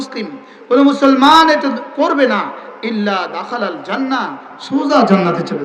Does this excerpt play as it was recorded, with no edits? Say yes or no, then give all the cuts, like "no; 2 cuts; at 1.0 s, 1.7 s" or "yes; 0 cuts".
yes; 0 cuts